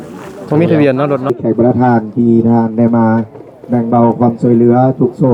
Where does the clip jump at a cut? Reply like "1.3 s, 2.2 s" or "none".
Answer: 1.3 s

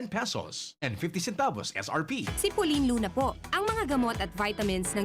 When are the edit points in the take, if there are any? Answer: 2.2 s

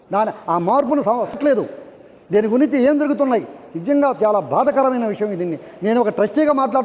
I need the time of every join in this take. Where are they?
none

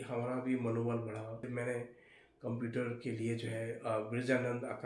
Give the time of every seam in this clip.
1.5 s

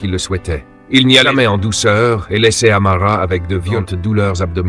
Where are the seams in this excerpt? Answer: 1.3 s, 3.8 s

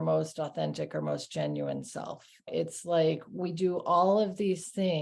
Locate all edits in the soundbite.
2.5 s

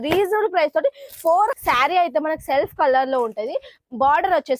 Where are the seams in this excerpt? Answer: 1.6 s

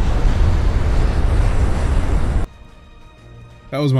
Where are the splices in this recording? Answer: 2.4 s

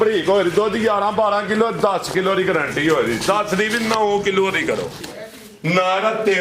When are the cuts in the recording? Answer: 5.1 s

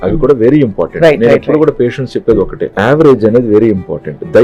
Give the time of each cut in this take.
2.6 s

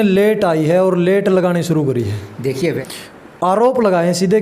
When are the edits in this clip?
2.8 s

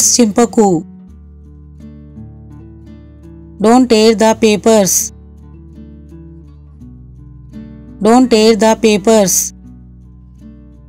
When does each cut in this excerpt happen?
0.8 s, 3.4 s, 4.9 s, 8.0 s, 10.0 s

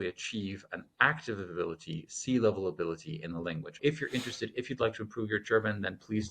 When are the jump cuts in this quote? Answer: 3.7 s

